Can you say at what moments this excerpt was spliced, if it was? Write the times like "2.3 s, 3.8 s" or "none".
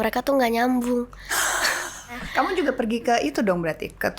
2.2 s